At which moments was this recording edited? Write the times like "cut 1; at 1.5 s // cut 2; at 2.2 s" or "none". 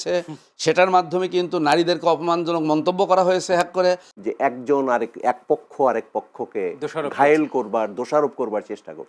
cut 1; at 4.1 s